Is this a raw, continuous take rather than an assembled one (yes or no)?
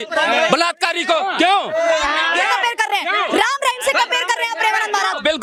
yes